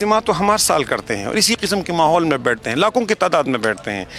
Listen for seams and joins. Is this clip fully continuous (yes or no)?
yes